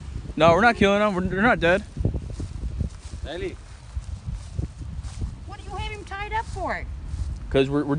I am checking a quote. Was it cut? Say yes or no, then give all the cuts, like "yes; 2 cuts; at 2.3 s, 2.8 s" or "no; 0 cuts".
no; 0 cuts